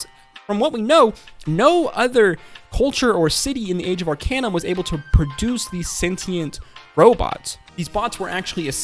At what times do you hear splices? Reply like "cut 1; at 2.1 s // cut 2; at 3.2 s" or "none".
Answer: cut 1; at 7.7 s